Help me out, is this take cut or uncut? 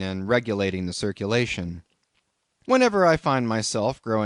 cut